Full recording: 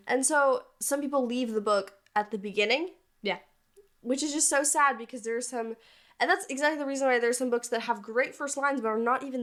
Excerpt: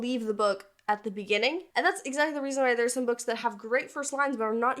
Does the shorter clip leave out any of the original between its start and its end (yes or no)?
yes